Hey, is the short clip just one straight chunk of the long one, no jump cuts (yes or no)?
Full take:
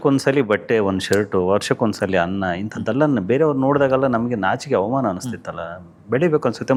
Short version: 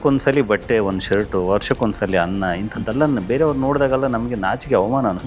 yes